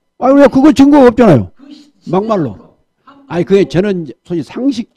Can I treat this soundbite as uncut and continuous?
yes; 0 cuts

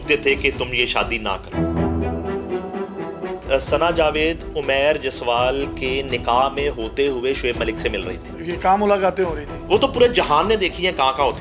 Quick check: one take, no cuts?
no; 1 cut; at 3.3 s

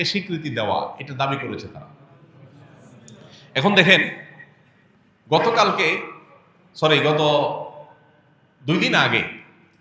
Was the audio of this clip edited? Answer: no; 0 cuts

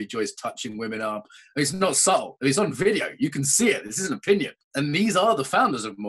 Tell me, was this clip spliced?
yes; 1 cut; at 4.6 s

